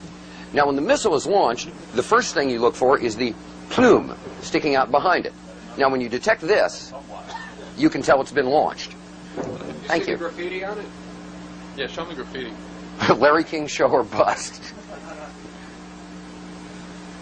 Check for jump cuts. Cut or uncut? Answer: uncut